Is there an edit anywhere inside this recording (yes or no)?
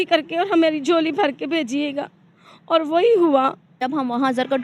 yes